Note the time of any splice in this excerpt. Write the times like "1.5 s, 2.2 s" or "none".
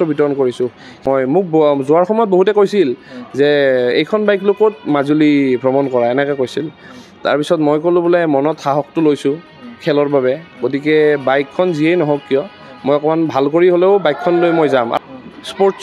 1.0 s, 14.9 s